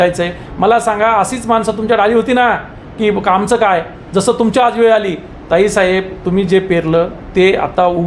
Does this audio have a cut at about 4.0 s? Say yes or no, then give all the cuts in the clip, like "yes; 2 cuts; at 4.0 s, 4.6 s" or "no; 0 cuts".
no; 0 cuts